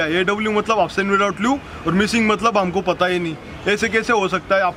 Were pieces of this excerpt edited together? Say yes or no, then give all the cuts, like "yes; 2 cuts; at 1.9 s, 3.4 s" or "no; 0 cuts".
no; 0 cuts